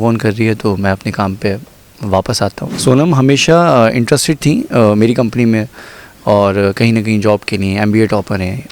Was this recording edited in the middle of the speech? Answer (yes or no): yes